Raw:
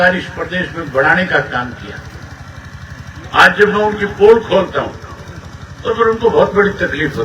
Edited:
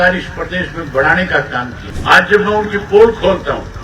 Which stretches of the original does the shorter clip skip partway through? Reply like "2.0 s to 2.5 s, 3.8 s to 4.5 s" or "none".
1.8 s to 3.1 s